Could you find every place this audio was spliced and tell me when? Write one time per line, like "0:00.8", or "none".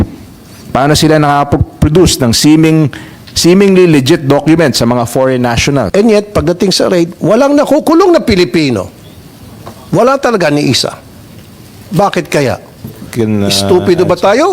0:05.9
0:13.0